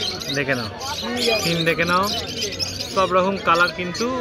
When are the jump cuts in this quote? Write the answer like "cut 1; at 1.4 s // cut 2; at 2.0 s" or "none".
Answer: none